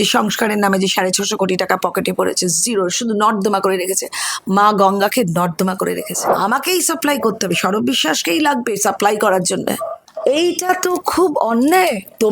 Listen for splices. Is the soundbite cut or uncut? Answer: cut